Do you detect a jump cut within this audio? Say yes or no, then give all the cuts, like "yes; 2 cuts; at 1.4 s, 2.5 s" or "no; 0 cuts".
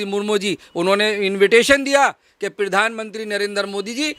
no; 0 cuts